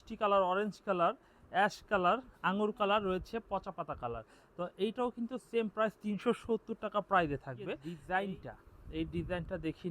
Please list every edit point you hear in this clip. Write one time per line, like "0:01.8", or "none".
0:07.9

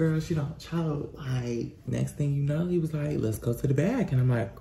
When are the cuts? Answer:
0:01.9

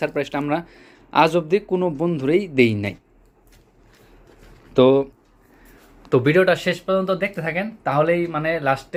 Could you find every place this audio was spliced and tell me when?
none

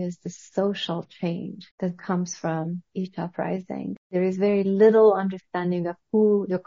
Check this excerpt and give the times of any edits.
0:01.6
0:04.1

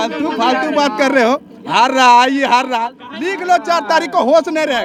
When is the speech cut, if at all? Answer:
none

